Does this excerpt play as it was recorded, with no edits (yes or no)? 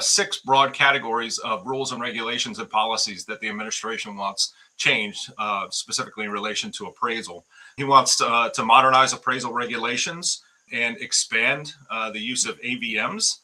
yes